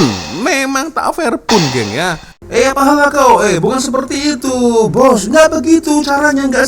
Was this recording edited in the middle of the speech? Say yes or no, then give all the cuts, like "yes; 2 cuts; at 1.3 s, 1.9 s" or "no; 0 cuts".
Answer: yes; 1 cut; at 2.3 s